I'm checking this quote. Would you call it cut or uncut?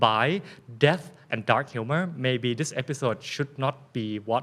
uncut